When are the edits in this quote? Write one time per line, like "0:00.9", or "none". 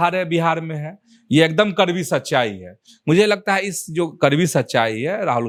none